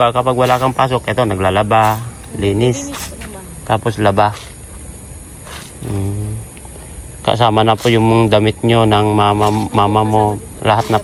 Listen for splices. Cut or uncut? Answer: uncut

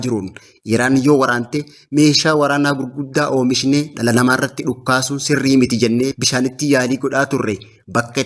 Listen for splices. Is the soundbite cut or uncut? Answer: uncut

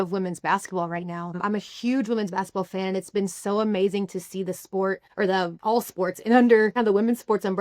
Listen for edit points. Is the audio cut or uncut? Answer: cut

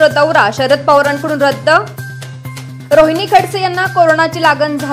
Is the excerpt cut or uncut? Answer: cut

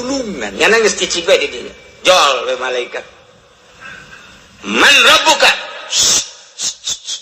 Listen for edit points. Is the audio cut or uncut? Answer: uncut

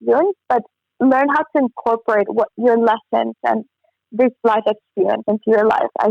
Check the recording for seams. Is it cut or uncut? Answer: uncut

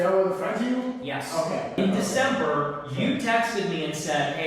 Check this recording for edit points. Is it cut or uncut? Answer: cut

